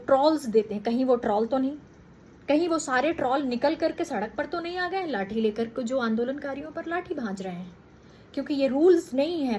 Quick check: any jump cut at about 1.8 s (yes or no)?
no